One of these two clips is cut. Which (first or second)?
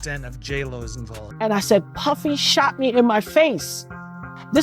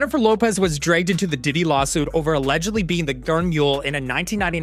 first